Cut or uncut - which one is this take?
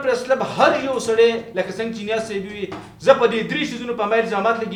uncut